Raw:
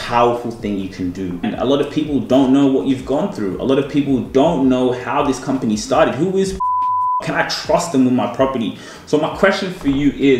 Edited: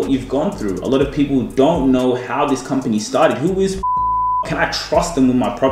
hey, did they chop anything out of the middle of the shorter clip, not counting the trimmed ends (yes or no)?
no